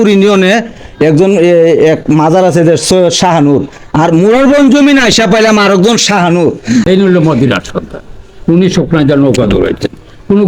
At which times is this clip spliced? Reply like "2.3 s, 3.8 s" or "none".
6.9 s

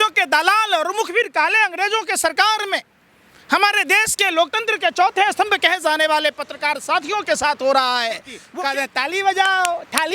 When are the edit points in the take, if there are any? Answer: 8.4 s

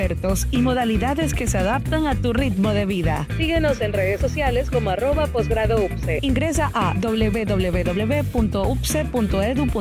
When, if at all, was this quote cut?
none

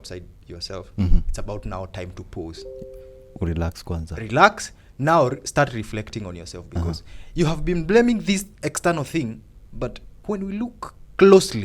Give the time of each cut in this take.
10.1 s

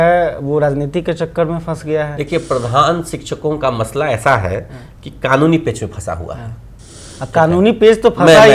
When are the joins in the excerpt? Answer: none

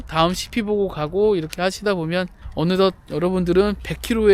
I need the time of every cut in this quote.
2.4 s

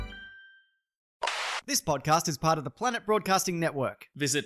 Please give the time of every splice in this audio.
1.3 s

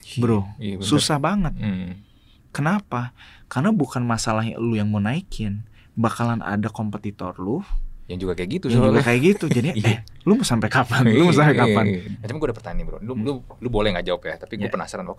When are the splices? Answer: 12.1 s

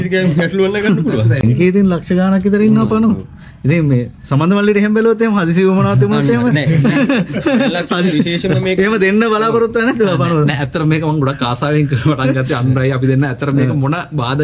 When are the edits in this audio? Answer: 1.4 s

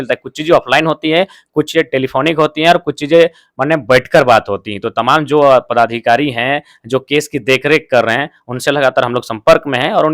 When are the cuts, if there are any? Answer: none

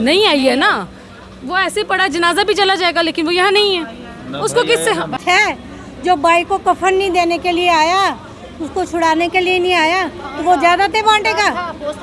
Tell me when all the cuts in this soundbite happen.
5.2 s

